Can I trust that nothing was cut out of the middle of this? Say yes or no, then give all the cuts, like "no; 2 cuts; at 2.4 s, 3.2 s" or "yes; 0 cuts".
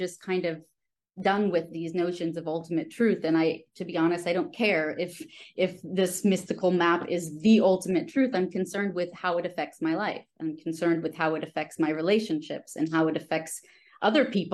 yes; 0 cuts